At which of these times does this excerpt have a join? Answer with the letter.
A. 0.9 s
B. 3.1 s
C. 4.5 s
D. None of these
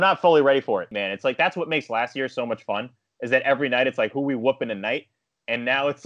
A